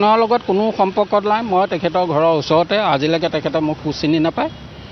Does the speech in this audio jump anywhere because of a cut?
no; 0 cuts

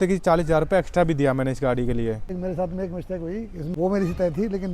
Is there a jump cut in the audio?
yes; 2 cuts; at 2.3 s, 3.6 s

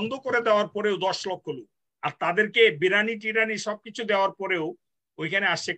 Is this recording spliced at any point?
no; 0 cuts

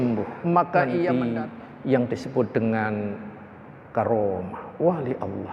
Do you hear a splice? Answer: yes; 1 cut; at 1.1 s

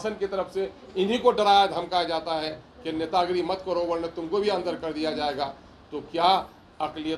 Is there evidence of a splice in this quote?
no; 0 cuts

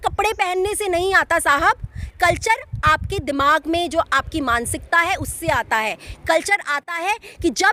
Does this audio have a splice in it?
no; 0 cuts

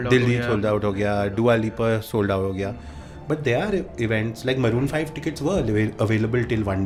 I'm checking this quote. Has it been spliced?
no; 0 cuts

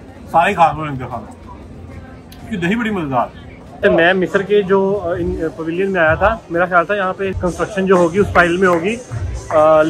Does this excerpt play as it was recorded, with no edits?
no; 2 cuts; at 3.8 s, 7.3 s

